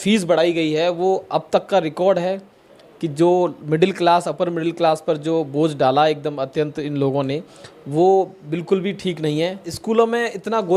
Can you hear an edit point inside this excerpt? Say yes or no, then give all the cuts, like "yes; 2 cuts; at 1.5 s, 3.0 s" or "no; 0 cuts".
yes; 1 cut; at 9.7 s